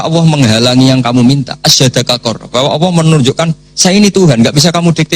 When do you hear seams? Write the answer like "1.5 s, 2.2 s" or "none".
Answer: none